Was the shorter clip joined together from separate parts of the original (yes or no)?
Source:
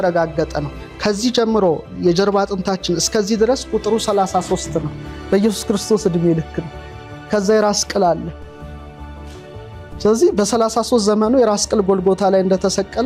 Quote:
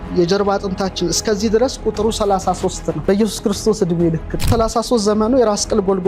yes